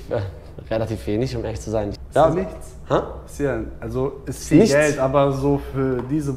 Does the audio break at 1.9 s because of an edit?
yes; 1 cut; at 1.9 s

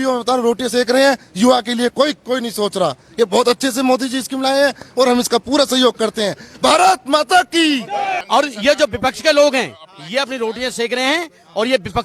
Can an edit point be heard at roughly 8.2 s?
yes; 1 cut; at 8.2 s

